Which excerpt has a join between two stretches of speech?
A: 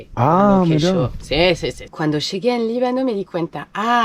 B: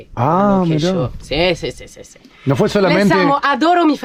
A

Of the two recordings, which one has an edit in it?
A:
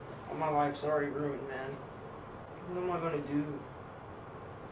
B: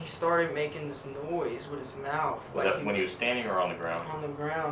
A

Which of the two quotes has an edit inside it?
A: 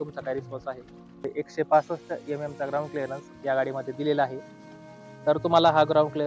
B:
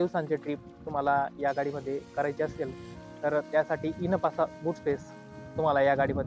A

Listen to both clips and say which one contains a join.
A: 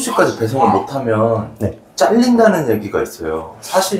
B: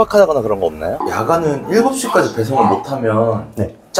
B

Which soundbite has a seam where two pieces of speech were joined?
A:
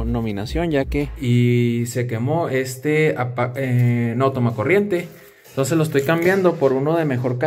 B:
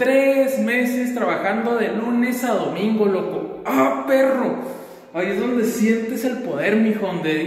A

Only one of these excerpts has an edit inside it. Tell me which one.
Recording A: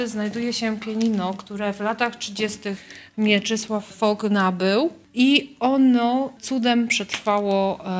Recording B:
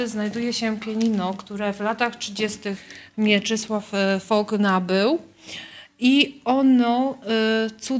A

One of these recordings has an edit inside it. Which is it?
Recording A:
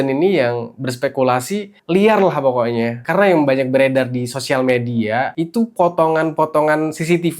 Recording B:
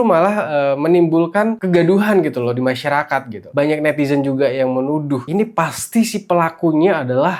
A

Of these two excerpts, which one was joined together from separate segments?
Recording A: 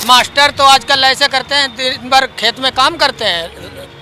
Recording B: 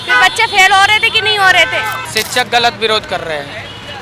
B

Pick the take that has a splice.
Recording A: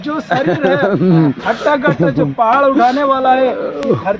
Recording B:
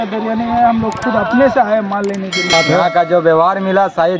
B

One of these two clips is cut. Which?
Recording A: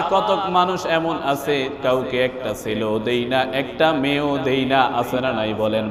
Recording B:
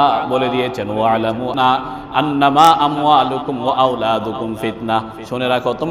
B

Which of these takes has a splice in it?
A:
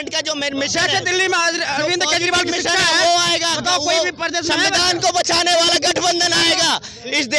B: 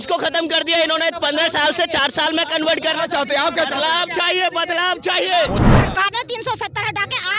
B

